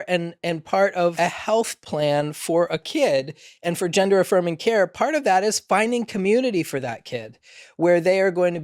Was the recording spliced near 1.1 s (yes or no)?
yes